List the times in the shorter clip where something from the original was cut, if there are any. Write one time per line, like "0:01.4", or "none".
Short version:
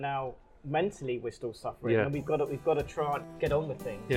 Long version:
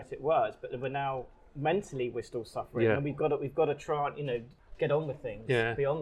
0:03.3

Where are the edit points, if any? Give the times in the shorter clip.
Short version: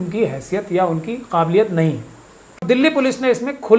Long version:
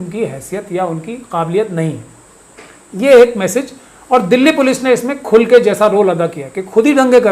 0:02.6

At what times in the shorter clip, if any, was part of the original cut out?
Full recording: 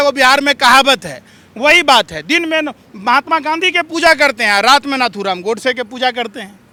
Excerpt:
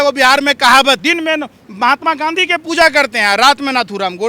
0:01.0

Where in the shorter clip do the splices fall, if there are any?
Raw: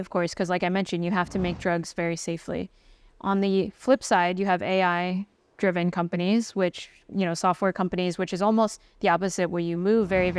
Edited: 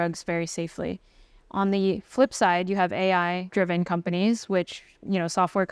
0:03.4

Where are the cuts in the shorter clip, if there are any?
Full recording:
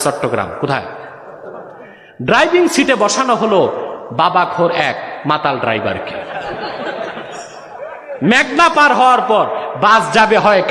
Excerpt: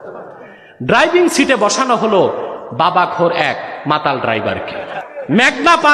0:05.0

